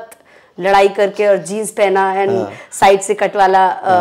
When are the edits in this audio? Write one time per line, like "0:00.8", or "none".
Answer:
none